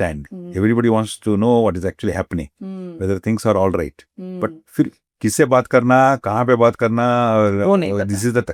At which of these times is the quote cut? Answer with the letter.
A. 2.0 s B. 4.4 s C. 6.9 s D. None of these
D